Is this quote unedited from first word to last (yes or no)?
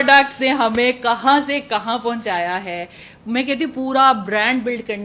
yes